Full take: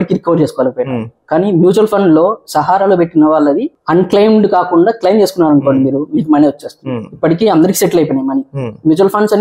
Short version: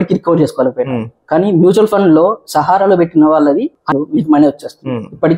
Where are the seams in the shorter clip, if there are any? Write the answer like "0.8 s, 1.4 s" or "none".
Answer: 3.9 s